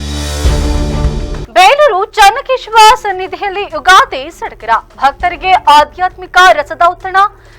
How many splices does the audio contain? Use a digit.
1